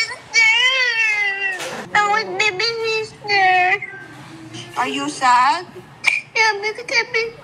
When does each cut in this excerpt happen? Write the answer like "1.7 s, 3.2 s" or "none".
1.8 s